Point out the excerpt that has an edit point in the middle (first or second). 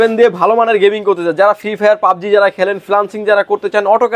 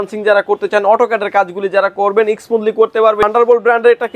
second